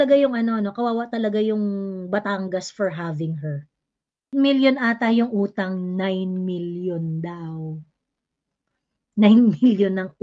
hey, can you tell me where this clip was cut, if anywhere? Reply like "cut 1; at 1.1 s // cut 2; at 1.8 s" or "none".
cut 1; at 4.3 s

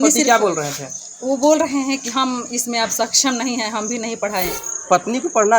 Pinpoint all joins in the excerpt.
cut 1; at 4.6 s

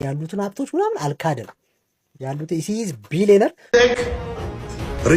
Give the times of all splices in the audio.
cut 1; at 3.7 s

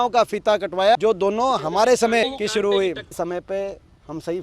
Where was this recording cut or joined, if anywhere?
cut 1; at 1.0 s // cut 2; at 2.2 s // cut 3; at 3.1 s

